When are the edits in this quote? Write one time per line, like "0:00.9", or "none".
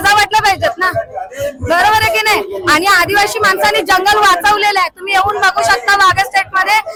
none